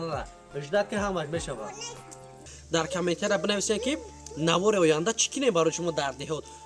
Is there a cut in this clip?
yes; 1 cut; at 2.5 s

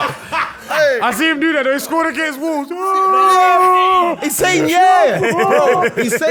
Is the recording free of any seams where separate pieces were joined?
yes; 0 cuts

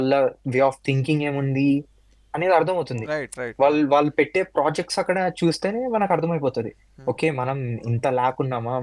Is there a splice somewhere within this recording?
no; 0 cuts

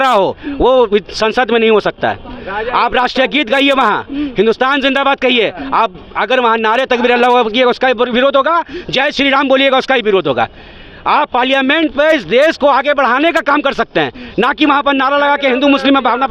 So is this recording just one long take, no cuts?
yes; 0 cuts

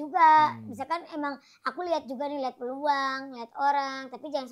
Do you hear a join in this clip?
no; 0 cuts

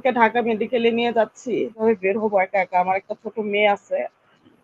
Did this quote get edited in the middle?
yes; 1 cut; at 1.8 s

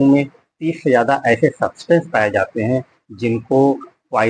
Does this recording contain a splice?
no; 0 cuts

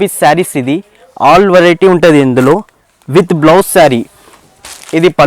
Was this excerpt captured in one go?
yes; 0 cuts

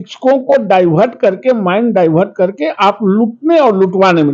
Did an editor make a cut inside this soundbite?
no; 0 cuts

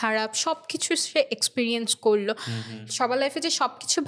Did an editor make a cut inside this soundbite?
no; 0 cuts

